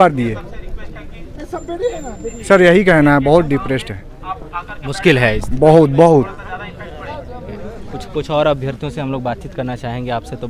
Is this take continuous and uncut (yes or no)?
yes